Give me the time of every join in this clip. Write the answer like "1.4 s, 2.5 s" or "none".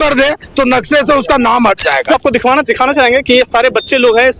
2.1 s